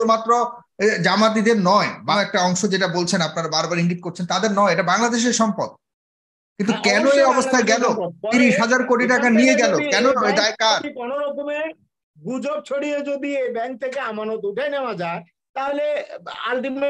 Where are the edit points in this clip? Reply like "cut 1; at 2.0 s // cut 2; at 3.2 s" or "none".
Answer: cut 1; at 2.1 s